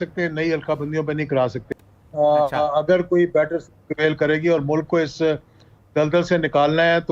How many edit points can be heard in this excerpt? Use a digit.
1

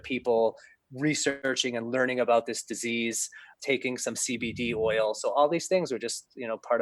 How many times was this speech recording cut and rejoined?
2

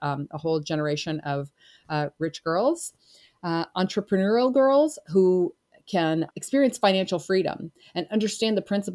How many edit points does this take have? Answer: 1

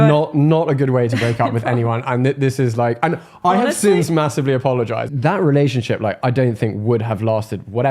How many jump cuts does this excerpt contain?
1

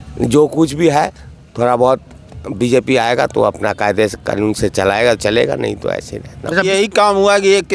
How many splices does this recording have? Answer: 1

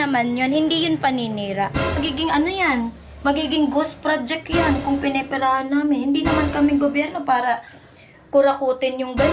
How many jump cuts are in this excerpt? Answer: 1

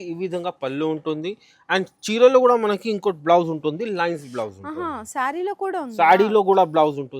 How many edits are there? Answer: 0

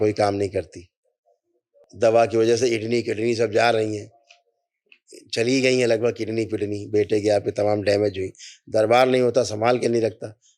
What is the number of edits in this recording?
1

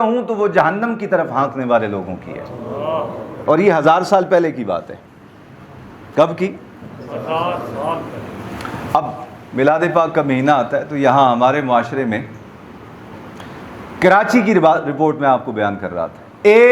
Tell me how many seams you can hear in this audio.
0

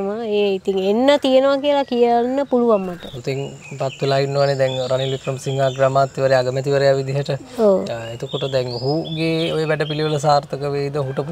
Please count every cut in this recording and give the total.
1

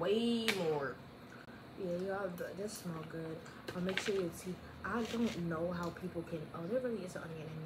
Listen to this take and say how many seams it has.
0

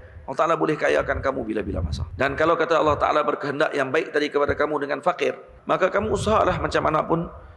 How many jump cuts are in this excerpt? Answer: 2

